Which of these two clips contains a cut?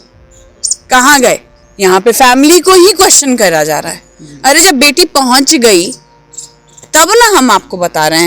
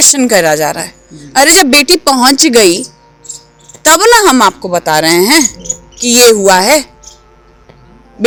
first; 1 cut; at 1.6 s

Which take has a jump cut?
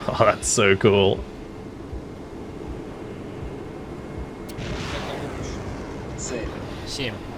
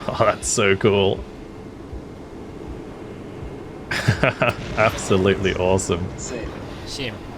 second; 2 cuts; at 4.0 s, 6.1 s

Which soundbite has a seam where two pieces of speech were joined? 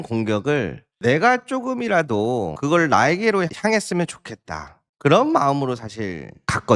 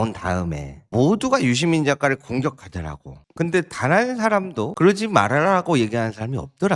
first; 1 cut; at 3.5 s

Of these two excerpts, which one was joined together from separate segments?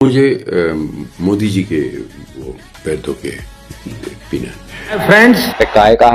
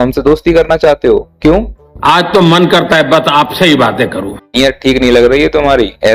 first; 1 cut; at 5.0 s

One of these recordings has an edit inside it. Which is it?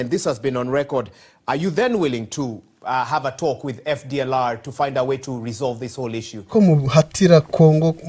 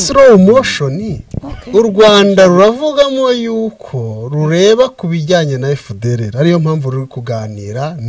first; 1 cut; at 6.5 s

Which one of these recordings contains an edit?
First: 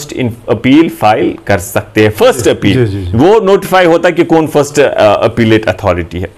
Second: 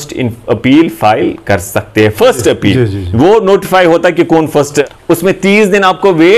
second; 1 cut; at 4.9 s

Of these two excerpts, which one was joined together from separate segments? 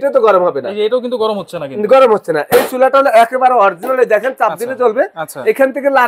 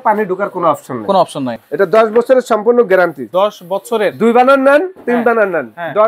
second; 2 cuts; at 1.6 s, 3.2 s

